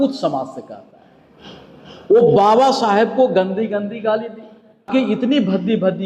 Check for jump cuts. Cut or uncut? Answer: cut